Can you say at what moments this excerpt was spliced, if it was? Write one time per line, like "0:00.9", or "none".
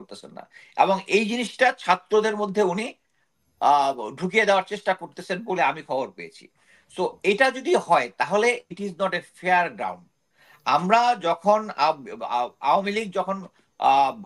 none